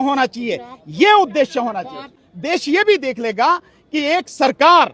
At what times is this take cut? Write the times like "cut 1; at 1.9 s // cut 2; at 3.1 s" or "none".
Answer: cut 1; at 2.3 s